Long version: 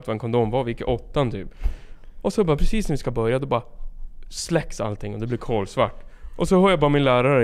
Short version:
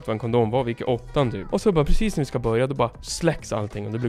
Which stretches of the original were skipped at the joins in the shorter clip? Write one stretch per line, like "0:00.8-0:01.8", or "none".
0:01.4-0:02.1
0:03.8-0:04.3